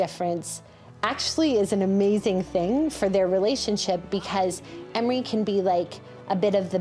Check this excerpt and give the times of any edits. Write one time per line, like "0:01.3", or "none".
none

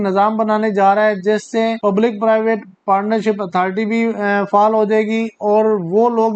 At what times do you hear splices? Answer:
0:01.8

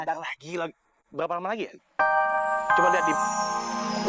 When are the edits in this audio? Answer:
0:02.0

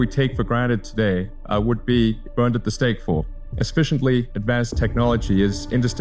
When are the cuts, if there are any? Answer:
0:01.3
0:02.2
0:03.4
0:04.3

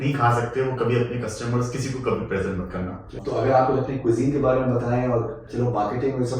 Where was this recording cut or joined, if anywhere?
0:03.2
0:05.5

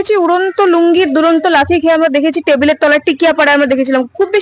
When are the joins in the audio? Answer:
none

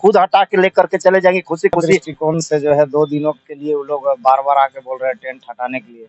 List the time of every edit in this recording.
0:02.1

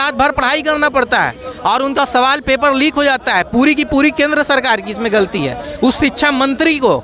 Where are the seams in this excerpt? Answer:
none

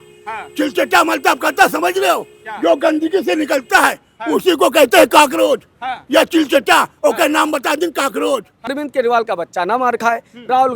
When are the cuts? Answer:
0:08.8

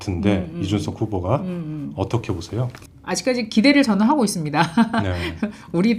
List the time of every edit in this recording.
0:02.9

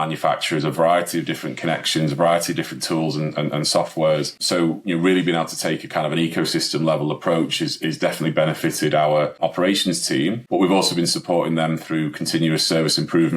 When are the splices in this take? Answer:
0:04.4
0:09.4
0:10.4

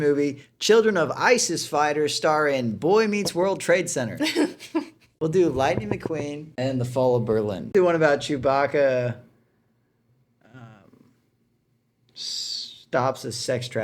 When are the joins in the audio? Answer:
0:05.1
0:06.4
0:07.7

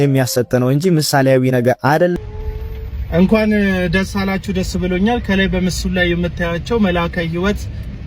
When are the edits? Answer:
0:02.1

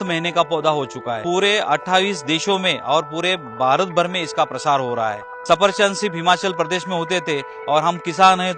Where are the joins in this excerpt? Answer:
0:01.2
0:05.3

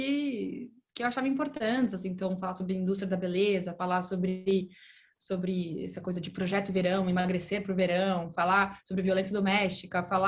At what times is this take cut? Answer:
none

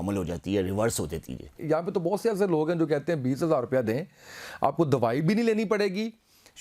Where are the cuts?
0:01.6

